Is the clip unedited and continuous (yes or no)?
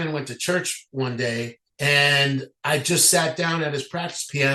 no